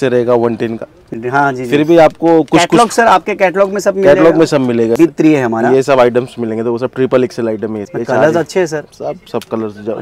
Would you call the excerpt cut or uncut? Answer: cut